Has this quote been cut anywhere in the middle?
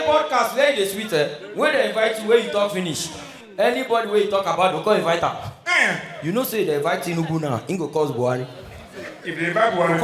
no; 0 cuts

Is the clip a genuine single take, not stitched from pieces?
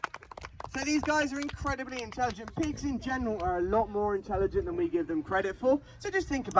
yes; 0 cuts

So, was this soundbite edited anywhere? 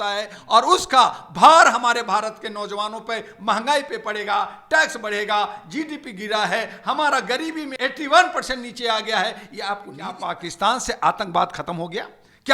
yes; 2 cuts; at 7.7 s, 10.2 s

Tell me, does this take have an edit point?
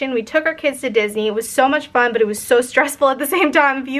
no; 0 cuts

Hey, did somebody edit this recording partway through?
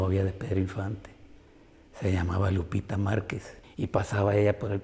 yes; 1 cut; at 3.3 s

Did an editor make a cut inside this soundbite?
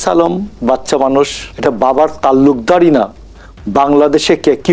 yes; 1 cut; at 1.4 s

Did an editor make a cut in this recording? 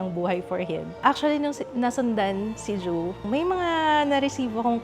yes; 2 cuts; at 1.0 s, 3.2 s

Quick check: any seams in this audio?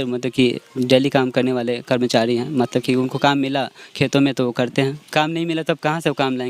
yes; 1 cut; at 5.0 s

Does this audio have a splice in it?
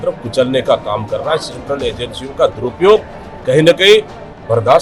no; 0 cuts

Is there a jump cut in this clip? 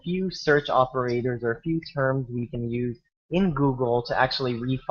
no; 0 cuts

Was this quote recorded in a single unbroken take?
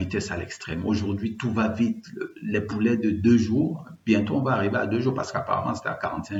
yes; 0 cuts

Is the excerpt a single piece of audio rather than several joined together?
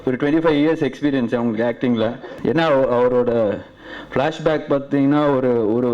no; 1 cut; at 2.3 s

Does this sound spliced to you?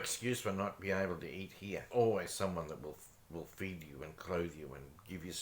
yes; 1 cut; at 1.9 s

